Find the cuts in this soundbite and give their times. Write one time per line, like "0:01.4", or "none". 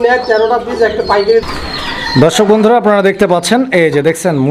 0:01.4